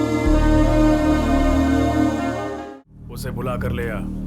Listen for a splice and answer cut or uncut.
cut